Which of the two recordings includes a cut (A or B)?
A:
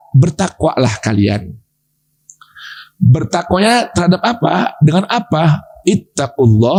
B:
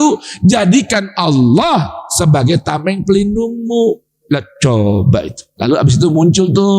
B